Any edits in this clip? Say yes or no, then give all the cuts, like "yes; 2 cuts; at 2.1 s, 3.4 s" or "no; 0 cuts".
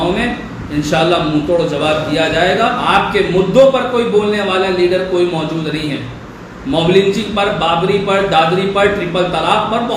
yes; 1 cut; at 2.8 s